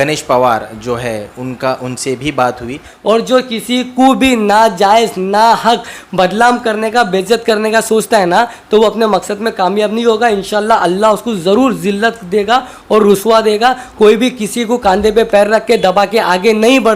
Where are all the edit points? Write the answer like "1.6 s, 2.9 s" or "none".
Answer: 2.9 s